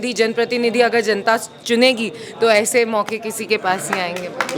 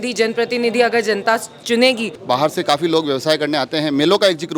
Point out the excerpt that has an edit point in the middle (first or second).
second